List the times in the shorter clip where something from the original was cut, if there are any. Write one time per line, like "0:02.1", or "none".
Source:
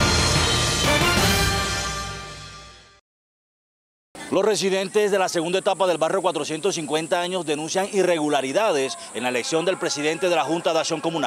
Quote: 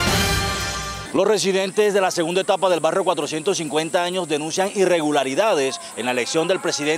0:00.9